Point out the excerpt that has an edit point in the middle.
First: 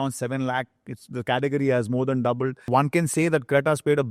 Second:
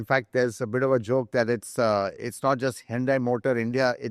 first; 1 cut; at 2.6 s

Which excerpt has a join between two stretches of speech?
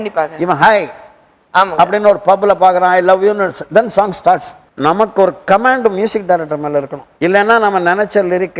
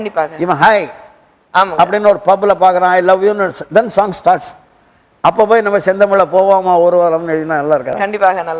first; 2 cuts; at 4.7 s, 7.0 s

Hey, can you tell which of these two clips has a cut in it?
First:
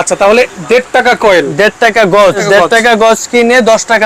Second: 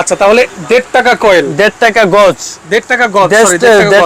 first; 1 cut; at 2.4 s

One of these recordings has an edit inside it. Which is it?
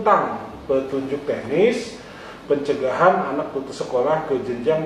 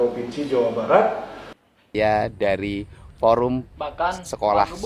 second; 1 cut; at 1.9 s

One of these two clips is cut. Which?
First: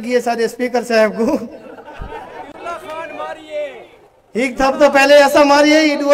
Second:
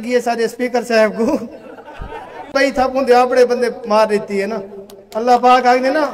second; 1 cut; at 2.5 s

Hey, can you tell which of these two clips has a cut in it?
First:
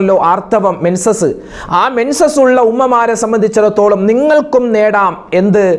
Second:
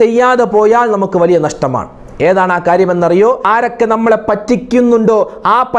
second; 1 cut; at 3.4 s

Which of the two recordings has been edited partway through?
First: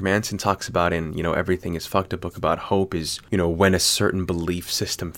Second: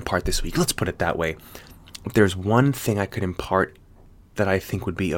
first; 1 cut; at 3.2 s

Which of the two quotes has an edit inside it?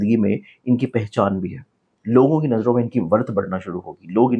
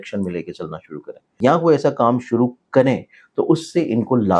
second; 1 cut; at 1.2 s

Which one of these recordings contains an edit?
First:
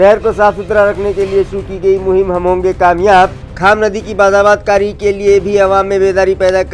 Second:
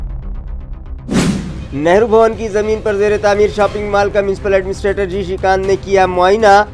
second; 1 cut; at 1.3 s

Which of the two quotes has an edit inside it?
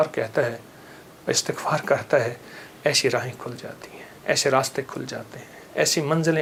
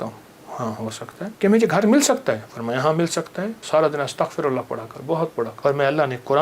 second; 3 cuts; at 1.3 s, 3.6 s, 5.5 s

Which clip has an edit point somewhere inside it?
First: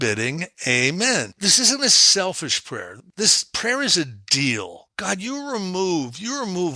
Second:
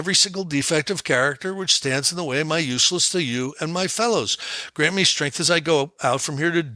first; 3 cuts; at 1.4 s, 2.9 s, 4.9 s

